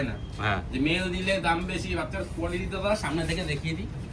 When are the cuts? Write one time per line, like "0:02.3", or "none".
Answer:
none